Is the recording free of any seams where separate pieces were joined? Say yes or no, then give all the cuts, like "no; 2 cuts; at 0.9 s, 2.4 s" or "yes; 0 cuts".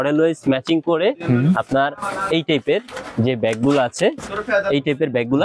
yes; 0 cuts